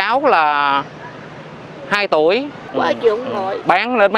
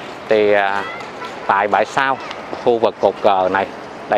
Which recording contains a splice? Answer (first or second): first